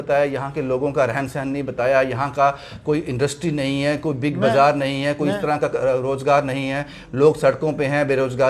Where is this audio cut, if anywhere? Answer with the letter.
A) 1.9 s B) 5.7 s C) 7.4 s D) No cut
D